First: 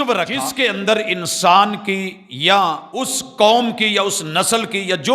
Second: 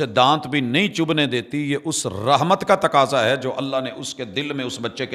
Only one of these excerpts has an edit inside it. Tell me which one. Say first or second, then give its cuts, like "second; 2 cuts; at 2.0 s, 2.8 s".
first; 2 cuts; at 0.8 s, 2.9 s